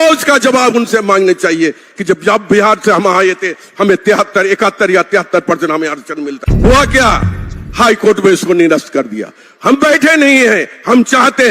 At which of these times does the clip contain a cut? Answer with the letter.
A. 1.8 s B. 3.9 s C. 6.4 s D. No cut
C